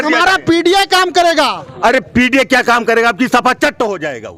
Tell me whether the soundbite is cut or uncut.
uncut